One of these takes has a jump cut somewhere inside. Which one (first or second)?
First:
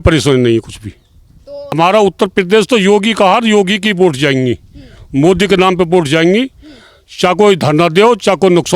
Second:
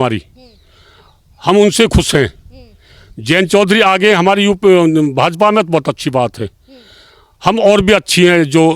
first